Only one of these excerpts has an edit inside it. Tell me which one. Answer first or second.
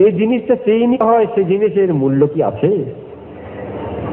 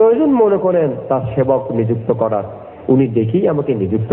first